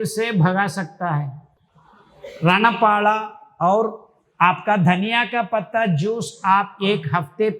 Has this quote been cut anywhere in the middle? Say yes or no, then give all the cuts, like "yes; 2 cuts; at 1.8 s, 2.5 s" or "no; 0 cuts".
no; 0 cuts